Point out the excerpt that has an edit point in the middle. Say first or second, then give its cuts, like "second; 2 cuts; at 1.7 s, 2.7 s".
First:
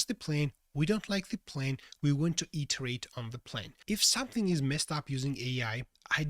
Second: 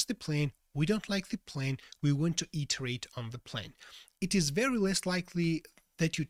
first; 1 cut; at 3.7 s